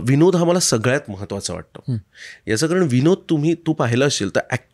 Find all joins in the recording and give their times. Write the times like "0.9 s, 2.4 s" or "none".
none